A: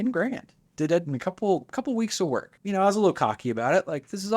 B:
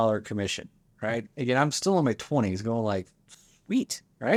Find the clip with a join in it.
A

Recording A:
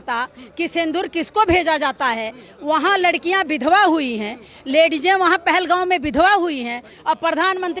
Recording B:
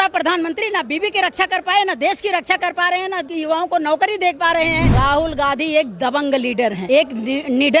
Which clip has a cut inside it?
B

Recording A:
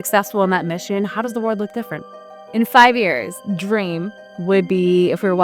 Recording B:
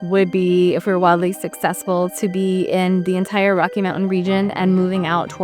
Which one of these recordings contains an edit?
A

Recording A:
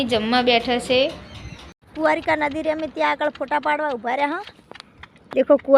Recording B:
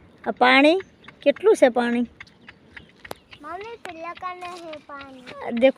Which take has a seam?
A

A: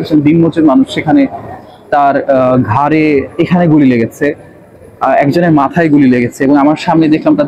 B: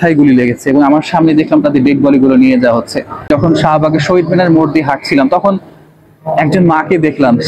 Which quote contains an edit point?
B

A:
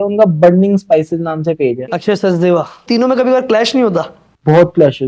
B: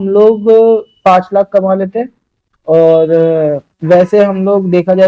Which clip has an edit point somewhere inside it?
A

